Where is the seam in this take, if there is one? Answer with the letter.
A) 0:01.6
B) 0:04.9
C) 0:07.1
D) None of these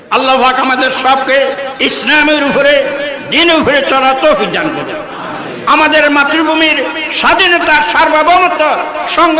A